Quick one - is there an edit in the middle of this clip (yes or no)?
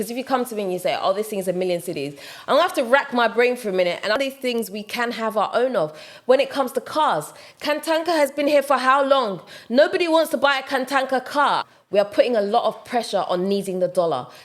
yes